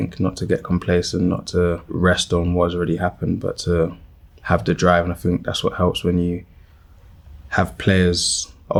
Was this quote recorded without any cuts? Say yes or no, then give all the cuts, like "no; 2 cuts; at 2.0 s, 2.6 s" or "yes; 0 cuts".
yes; 0 cuts